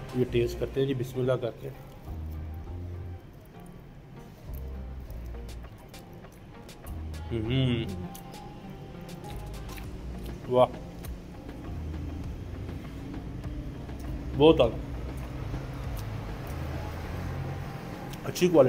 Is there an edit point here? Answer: no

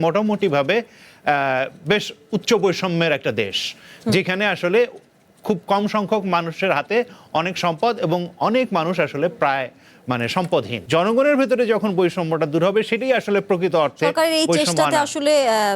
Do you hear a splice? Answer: yes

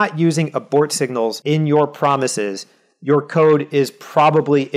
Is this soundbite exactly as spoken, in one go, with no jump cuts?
no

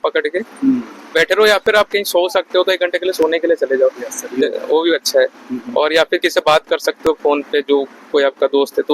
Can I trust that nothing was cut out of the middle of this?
yes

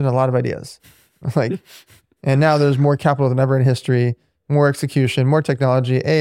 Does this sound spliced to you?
no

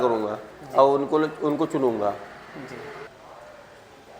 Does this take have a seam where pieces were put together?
yes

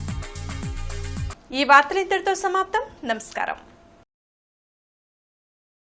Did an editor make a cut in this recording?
no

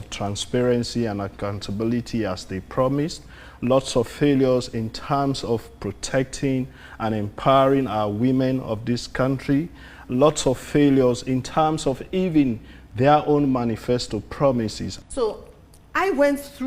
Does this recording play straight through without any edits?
no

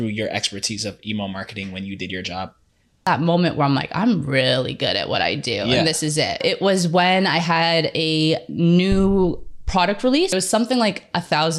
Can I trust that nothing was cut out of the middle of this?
no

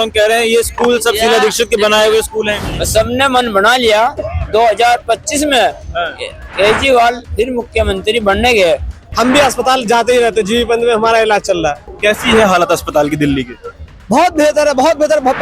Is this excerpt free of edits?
no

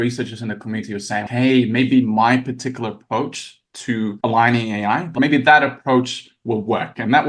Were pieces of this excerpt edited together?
yes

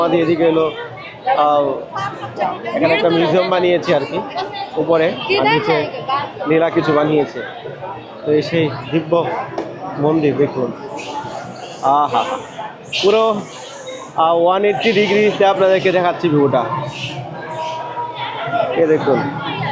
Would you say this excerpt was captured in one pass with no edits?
yes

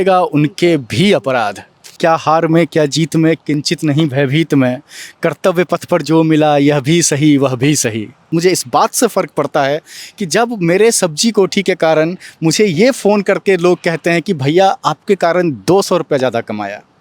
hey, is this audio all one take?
no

